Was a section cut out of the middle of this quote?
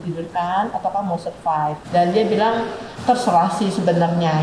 yes; 2 cuts; at 1.8 s, 2.8 s

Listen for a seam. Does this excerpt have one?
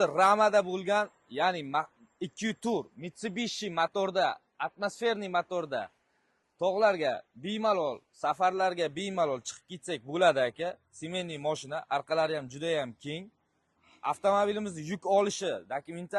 no; 0 cuts

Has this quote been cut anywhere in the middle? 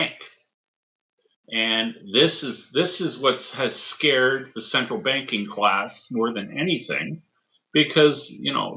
no; 0 cuts

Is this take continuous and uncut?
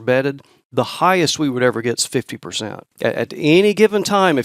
no; 1 cut; at 2.9 s

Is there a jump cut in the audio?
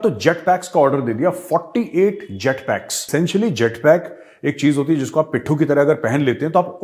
yes; 1 cut; at 3.0 s

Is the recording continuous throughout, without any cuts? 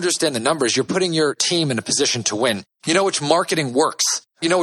yes; 0 cuts

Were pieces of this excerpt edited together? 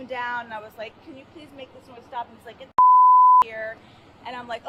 no; 0 cuts

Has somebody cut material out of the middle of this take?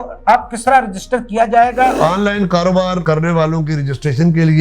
yes; 1 cut; at 2.0 s

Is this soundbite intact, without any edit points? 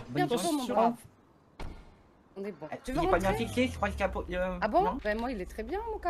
yes; 0 cuts

